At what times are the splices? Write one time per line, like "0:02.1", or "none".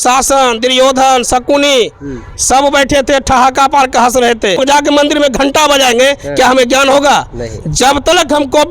0:04.6